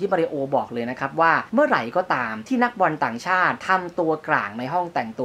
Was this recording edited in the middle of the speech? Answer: yes; 3 cuts; at 1.4 s, 2.3 s, 3.6 s

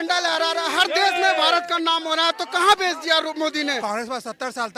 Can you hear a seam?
yes; 1 cut; at 3.7 s

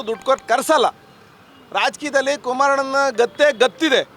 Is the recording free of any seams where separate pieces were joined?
yes; 0 cuts

